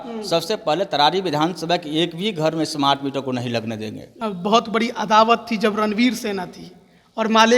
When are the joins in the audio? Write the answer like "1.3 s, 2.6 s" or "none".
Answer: 4.1 s